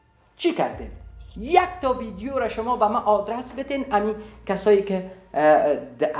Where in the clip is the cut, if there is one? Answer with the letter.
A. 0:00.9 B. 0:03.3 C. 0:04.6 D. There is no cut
D